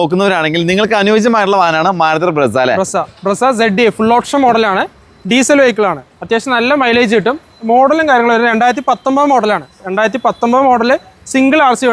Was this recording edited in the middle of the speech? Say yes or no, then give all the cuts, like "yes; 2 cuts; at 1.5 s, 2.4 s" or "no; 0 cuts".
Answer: no; 0 cuts